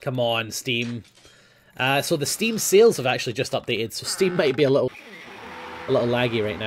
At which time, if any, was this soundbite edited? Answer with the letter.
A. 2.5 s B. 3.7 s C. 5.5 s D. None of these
A